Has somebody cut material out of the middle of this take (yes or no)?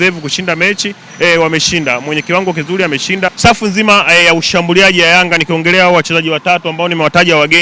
yes